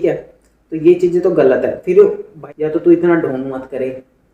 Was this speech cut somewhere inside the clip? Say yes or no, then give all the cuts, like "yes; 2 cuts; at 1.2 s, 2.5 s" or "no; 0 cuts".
yes; 1 cut; at 2.3 s